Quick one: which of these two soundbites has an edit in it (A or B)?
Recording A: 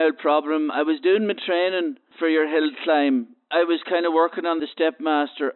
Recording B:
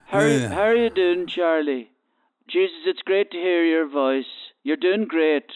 A